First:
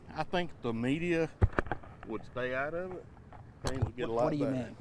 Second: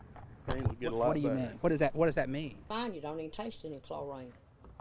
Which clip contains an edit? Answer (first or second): second